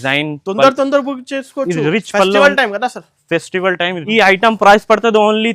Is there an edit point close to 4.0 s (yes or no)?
yes